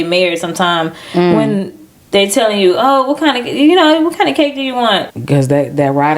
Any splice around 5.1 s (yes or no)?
yes